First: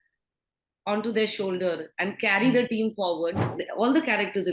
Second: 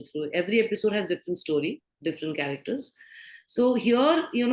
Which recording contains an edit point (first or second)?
first